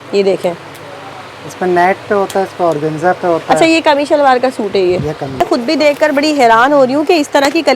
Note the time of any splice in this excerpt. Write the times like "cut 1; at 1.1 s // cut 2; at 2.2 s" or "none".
cut 1; at 5.4 s